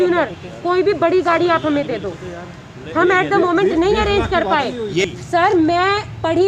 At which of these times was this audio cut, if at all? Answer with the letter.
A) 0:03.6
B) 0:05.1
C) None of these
B